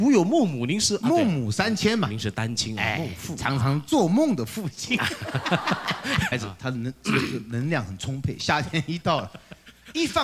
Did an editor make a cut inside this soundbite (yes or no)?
yes